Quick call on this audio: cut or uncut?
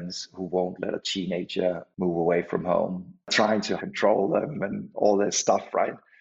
cut